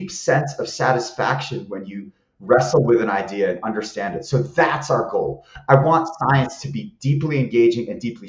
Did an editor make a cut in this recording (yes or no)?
no